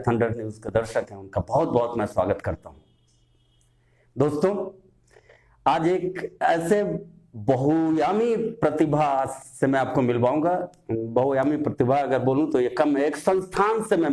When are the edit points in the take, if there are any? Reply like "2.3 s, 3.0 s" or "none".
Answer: none

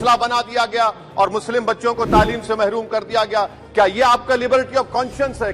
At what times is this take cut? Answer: none

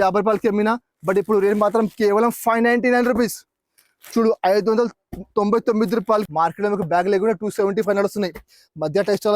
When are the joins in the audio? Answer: 6.3 s

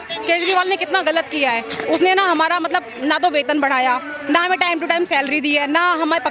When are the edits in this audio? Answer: none

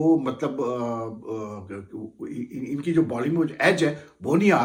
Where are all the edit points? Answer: none

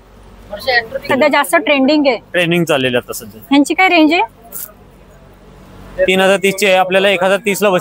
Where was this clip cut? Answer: 1.1 s

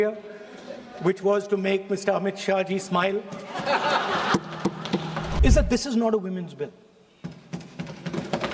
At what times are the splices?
5.4 s

